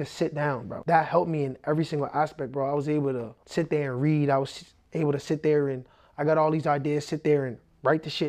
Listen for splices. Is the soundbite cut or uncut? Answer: uncut